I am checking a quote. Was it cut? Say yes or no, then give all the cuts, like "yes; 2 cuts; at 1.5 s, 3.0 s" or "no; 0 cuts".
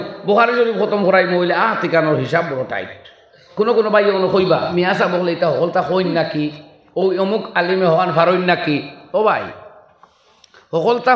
yes; 2 cuts; at 3.4 s, 4.7 s